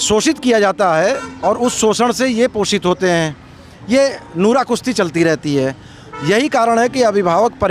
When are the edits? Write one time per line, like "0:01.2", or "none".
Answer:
none